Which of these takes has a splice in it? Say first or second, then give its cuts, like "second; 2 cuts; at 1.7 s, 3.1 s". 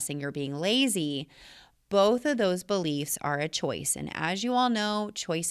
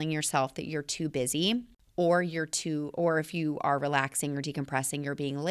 second; 1 cut; at 1.8 s